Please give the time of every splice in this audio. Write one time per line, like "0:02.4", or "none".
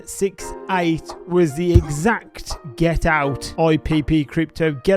0:03.4